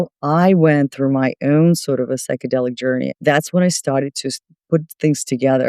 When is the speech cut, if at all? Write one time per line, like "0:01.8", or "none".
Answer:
0:03.1